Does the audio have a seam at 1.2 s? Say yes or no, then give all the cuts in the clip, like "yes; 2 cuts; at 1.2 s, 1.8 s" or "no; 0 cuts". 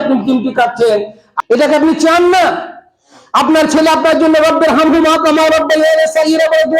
yes; 1 cut; at 1.2 s